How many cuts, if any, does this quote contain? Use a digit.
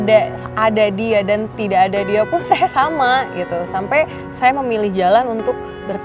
0